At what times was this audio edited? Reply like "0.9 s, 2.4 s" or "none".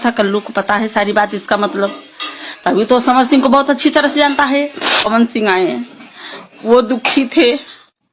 5.0 s